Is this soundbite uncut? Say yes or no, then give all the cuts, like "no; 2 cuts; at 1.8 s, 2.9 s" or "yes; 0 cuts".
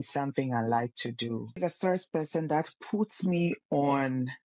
no; 1 cut; at 1.6 s